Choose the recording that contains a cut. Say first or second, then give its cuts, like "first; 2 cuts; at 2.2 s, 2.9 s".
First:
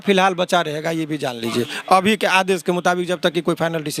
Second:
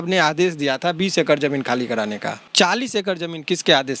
second; 1 cut; at 2.5 s